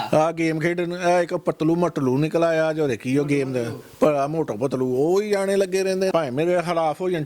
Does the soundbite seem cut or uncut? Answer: cut